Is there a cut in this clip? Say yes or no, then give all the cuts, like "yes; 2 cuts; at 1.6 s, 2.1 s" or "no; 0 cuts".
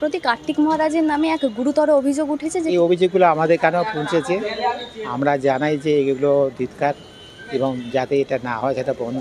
no; 0 cuts